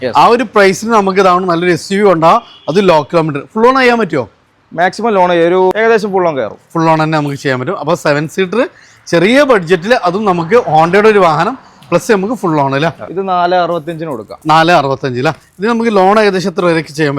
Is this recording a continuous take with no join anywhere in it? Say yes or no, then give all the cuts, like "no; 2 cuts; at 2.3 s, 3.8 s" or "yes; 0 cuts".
no; 2 cuts; at 5.7 s, 13.1 s